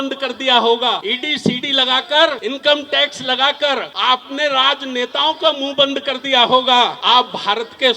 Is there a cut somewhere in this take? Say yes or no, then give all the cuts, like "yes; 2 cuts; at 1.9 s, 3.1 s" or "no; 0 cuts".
yes; 4 cuts; at 1.1 s, 2.4 s, 3.9 s, 7.0 s